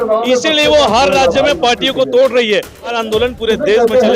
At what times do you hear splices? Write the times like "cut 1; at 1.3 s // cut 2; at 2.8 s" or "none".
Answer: cut 1; at 2.9 s